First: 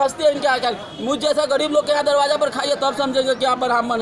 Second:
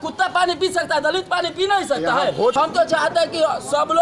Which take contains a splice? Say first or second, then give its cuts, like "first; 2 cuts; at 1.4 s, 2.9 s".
second; 1 cut; at 2.5 s